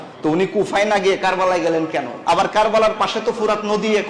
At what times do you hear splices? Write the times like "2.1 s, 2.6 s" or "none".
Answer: 2.1 s